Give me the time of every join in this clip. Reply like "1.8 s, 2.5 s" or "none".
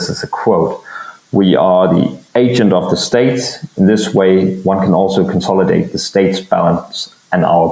none